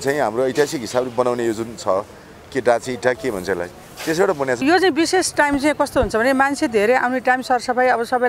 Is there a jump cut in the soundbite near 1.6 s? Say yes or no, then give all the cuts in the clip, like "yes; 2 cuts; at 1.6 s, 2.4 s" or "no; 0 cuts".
no; 1 cut; at 4.6 s